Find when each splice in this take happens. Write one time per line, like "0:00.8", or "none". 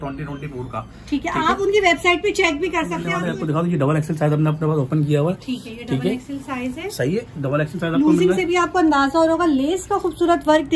0:03.1